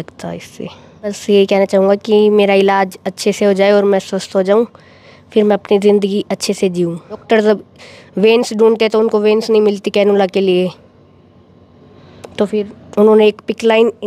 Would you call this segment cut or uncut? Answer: cut